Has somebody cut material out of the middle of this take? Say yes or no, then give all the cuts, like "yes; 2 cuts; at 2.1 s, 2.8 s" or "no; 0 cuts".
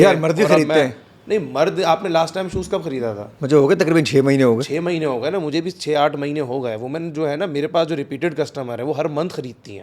no; 0 cuts